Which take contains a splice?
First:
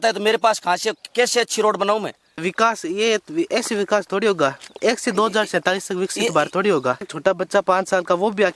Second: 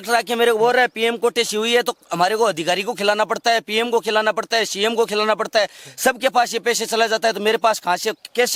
first; 2 cuts; at 2.4 s, 7.1 s

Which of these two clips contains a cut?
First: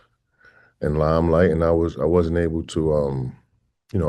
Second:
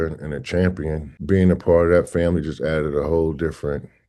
second; 1 cut; at 1.1 s

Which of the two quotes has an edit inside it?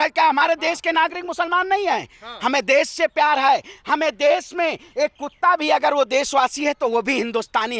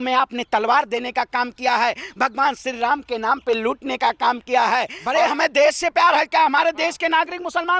second; 1 cut; at 5.0 s

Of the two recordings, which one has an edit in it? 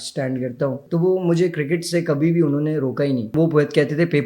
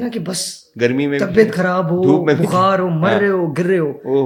first; 2 cuts; at 0.8 s, 3.3 s

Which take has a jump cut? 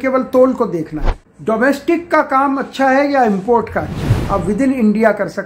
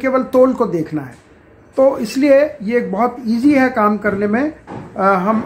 first; 2 cuts; at 1.3 s, 4.1 s

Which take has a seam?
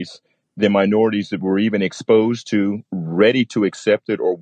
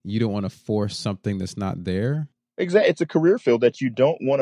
second; 1 cut; at 2.4 s

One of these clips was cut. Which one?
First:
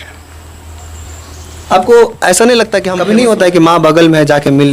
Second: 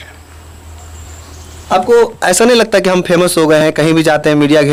first; 1 cut; at 2.9 s

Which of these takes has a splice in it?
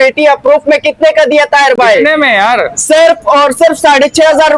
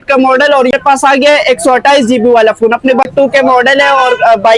second; 2 cuts; at 0.7 s, 3.0 s

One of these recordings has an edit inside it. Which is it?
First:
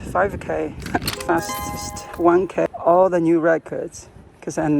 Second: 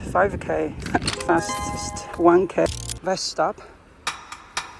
second; 1 cut; at 2.8 s

